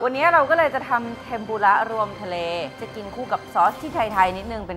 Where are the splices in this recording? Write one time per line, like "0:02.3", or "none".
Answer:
0:02.7